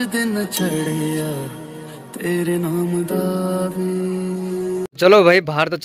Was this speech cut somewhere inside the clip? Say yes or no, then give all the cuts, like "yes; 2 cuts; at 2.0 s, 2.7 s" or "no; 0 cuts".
yes; 1 cut; at 4.9 s